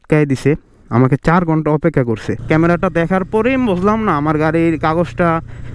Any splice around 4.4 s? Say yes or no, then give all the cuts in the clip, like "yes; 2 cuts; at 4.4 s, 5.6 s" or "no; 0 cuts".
no; 1 cut; at 2.3 s